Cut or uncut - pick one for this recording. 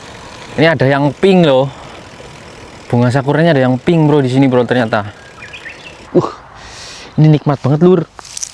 cut